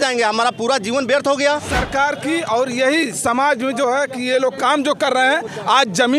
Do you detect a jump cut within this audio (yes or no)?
yes